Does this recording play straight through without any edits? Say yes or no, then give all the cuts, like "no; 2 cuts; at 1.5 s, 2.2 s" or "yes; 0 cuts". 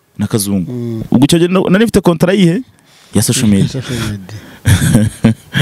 no; 1 cut; at 1.0 s